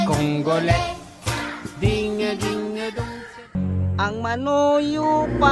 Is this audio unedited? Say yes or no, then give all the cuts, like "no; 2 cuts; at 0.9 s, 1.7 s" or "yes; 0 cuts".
no; 1 cut; at 3.6 s